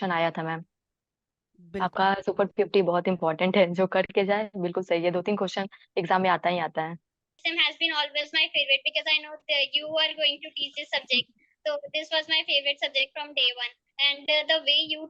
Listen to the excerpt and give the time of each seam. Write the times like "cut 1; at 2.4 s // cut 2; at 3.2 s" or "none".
cut 1; at 7.3 s

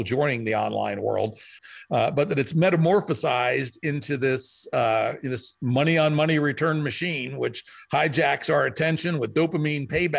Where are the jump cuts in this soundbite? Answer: cut 1; at 1.6 s

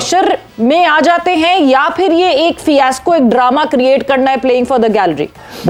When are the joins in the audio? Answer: none

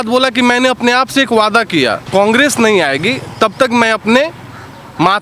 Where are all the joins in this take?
cut 1; at 2.0 s

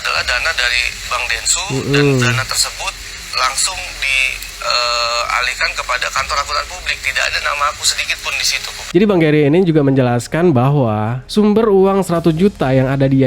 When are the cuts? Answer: cut 1; at 8.9 s

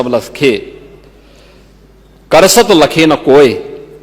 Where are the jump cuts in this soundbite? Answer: none

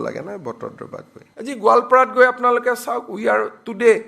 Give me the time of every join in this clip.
cut 1; at 1.2 s

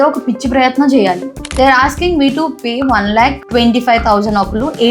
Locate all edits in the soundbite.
cut 1; at 1.3 s

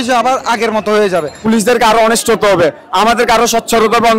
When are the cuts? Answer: cut 1; at 1.4 s

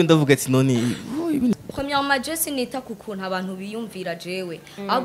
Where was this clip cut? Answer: cut 1; at 1.6 s

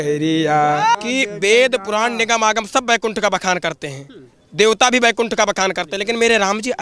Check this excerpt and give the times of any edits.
cut 1; at 0.9 s

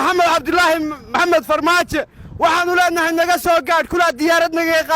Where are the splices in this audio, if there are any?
cut 1; at 1.2 s

